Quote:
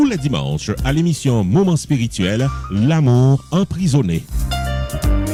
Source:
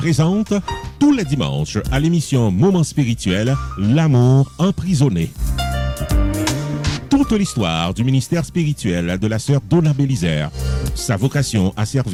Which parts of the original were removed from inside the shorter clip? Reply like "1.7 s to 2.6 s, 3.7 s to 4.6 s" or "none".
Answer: none